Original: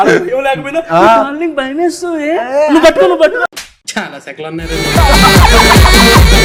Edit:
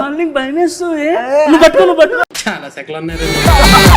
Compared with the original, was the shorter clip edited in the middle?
yes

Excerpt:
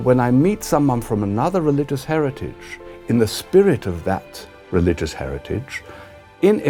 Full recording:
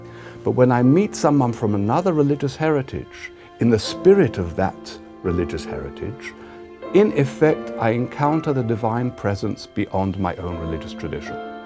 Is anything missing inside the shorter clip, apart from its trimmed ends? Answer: no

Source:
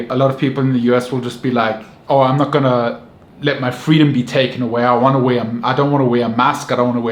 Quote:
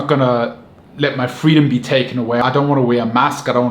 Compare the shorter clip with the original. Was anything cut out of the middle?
yes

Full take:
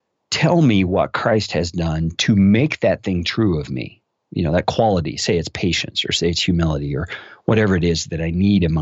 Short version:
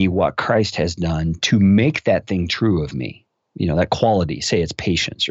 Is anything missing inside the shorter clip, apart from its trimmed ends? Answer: no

